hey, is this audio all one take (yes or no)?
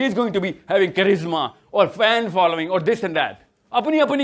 yes